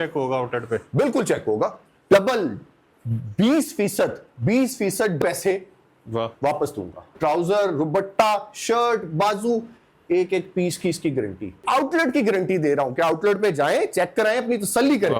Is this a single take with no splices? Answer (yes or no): no